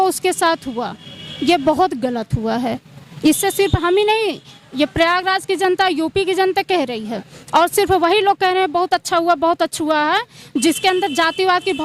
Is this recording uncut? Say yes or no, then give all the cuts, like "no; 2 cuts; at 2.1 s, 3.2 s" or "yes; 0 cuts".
yes; 0 cuts